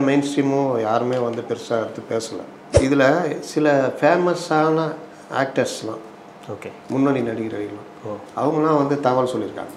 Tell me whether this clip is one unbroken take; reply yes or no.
no